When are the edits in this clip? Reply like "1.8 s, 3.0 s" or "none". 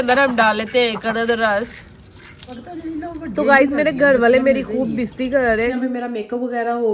2.5 s, 5.7 s